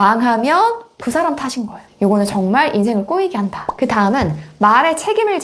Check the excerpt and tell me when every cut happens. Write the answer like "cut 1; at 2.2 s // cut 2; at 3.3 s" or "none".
none